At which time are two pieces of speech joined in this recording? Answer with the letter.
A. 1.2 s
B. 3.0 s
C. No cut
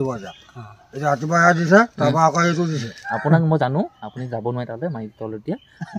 B